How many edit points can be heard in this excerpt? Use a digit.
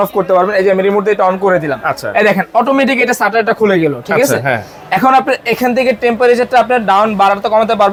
0